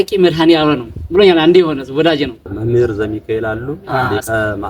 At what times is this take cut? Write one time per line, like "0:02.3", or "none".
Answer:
0:02.5